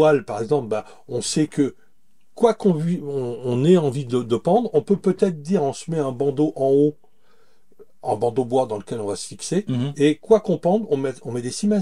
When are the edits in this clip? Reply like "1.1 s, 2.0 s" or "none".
none